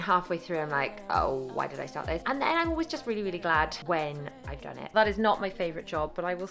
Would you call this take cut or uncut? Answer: cut